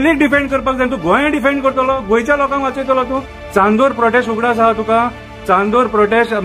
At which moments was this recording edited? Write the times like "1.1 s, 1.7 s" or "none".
3.4 s